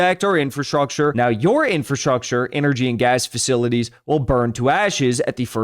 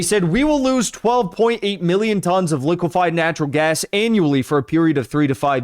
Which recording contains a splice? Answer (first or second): first